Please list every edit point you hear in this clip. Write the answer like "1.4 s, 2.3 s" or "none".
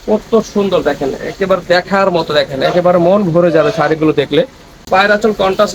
4.7 s